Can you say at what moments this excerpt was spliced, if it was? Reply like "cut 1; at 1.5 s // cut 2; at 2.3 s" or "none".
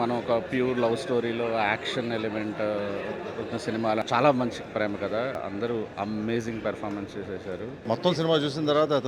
cut 1; at 4.0 s // cut 2; at 5.4 s // cut 3; at 7.8 s